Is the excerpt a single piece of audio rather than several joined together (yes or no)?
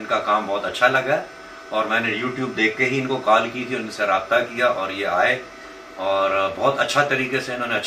yes